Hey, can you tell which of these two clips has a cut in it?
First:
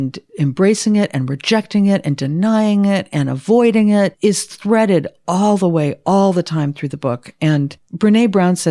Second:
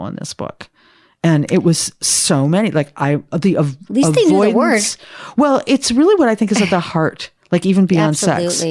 first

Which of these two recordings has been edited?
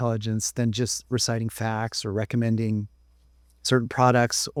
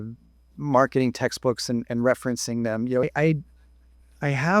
second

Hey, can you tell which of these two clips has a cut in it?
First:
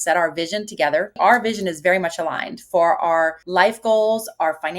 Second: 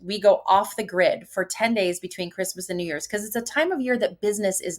first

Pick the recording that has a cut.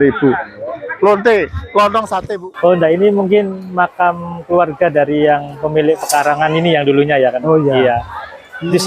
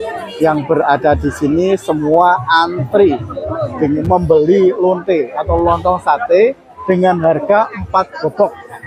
first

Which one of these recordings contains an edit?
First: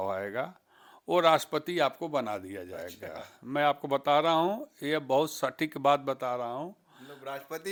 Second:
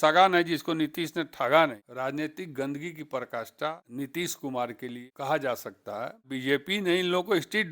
second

